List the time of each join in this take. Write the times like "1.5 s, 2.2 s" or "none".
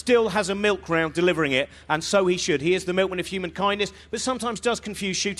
4.0 s